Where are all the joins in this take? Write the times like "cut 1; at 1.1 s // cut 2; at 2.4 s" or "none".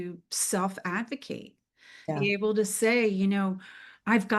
cut 1; at 2.1 s